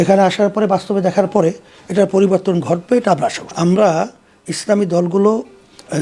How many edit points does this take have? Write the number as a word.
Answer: one